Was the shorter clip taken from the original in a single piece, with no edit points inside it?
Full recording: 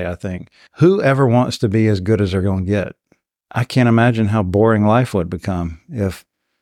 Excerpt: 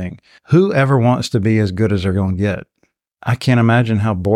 yes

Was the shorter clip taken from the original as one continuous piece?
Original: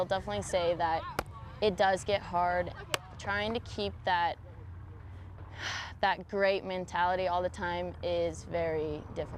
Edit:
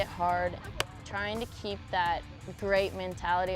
no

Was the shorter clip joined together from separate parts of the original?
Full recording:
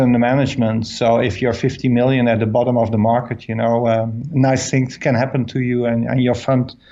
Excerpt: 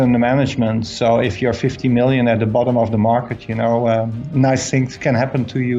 no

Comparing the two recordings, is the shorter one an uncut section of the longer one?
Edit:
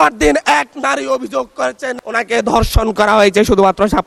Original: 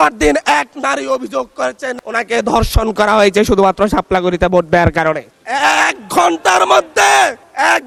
yes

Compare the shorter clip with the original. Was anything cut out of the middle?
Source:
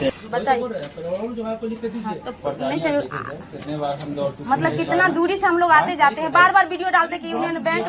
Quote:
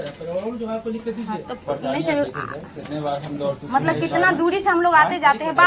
no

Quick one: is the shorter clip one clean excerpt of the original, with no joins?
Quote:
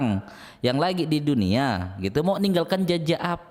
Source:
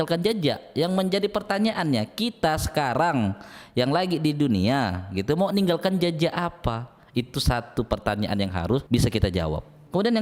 yes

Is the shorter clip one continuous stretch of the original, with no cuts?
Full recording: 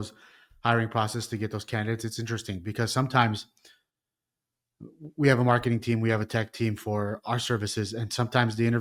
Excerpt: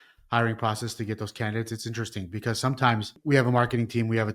no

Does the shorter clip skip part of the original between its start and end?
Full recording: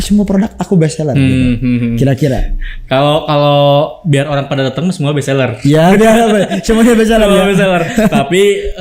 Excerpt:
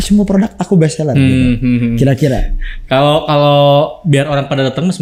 no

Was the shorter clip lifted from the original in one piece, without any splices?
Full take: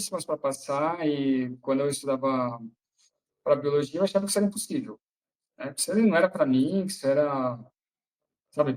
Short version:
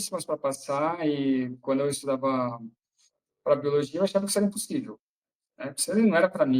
yes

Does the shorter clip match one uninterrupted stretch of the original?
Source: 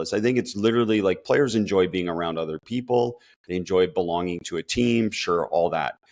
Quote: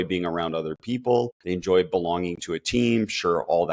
no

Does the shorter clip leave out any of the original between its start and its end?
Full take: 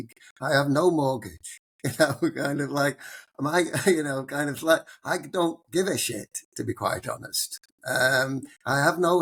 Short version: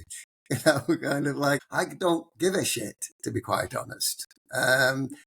yes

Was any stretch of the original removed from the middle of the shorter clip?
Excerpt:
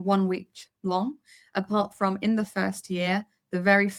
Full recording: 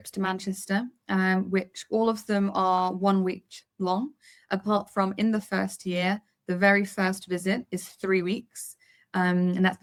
no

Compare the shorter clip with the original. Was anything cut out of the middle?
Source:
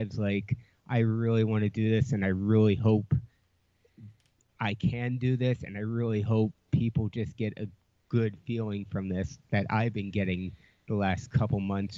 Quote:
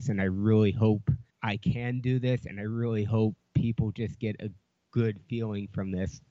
yes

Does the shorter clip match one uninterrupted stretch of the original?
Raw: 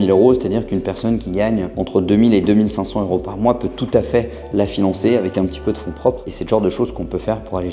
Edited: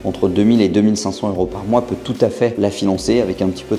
no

